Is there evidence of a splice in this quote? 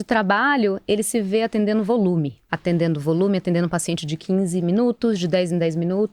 yes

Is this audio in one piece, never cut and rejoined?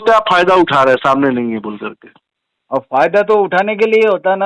yes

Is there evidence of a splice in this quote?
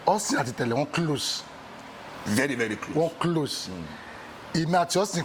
no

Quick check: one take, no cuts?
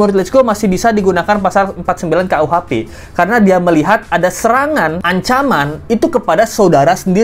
yes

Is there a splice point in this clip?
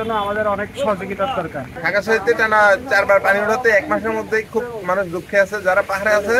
yes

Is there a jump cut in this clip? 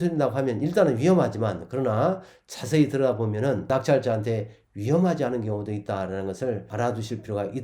yes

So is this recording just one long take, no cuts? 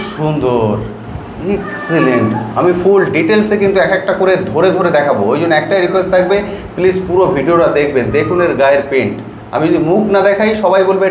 yes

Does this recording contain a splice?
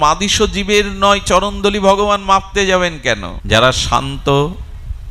yes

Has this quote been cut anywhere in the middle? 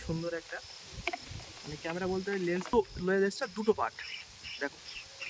yes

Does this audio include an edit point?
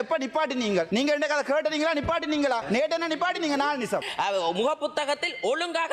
yes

